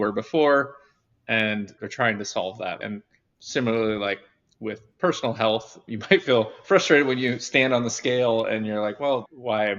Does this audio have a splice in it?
yes; 2 cuts; at 1.8 s, 2.8 s

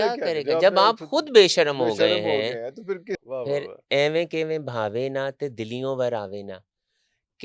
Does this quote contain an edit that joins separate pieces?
yes; 1 cut; at 3.2 s

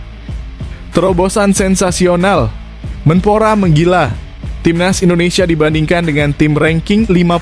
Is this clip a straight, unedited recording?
no; 1 cut; at 0.9 s

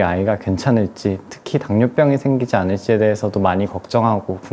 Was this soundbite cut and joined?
no; 0 cuts

